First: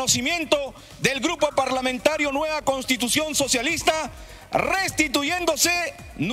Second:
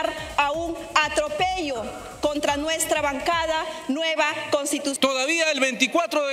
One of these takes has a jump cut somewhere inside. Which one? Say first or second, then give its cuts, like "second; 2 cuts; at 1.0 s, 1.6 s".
second; 1 cut; at 5.0 s